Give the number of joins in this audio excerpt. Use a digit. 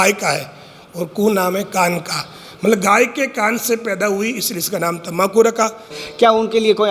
1